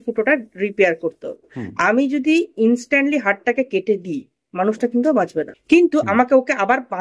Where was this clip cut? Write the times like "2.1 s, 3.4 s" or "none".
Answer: 1.7 s, 5.5 s